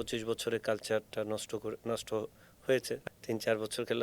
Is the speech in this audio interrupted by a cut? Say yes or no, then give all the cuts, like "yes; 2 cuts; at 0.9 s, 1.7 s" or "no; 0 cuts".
yes; 1 cut; at 2.9 s